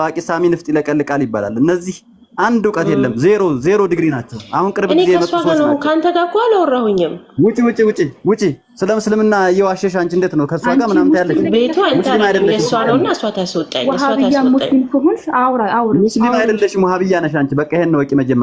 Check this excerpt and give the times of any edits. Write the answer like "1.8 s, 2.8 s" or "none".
none